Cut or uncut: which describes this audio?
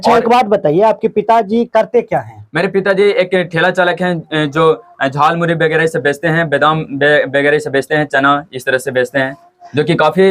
uncut